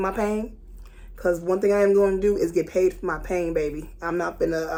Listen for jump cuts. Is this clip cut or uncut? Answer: uncut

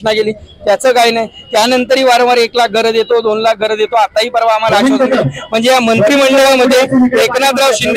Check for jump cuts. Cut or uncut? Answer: uncut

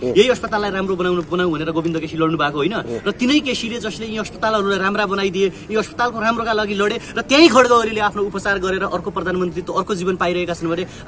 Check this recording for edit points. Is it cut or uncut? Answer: uncut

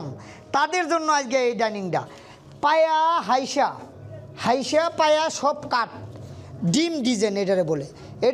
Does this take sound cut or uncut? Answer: uncut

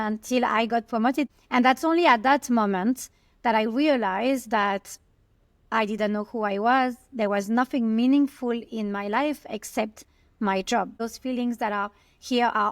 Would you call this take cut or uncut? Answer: cut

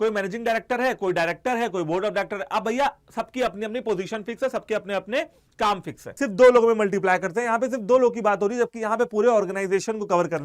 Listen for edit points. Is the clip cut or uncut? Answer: cut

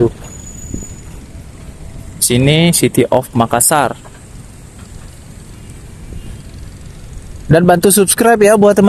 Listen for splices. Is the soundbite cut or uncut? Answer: uncut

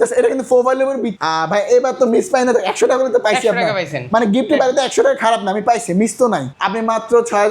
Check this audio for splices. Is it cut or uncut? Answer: cut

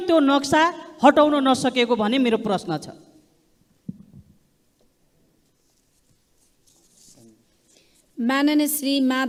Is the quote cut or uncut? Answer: uncut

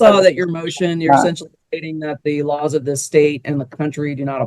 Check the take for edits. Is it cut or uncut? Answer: uncut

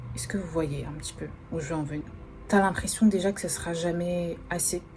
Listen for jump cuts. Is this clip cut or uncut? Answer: cut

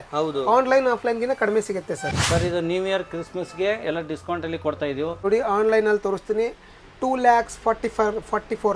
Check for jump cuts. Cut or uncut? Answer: cut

